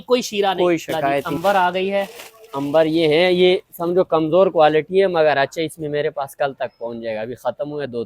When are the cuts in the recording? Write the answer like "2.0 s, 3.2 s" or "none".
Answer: 1.3 s